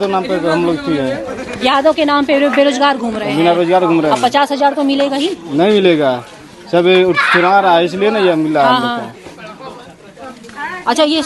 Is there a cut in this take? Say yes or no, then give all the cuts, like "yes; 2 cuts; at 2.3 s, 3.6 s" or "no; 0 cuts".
no; 0 cuts